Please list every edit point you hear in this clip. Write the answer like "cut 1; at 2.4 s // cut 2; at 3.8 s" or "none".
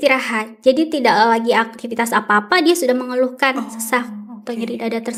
none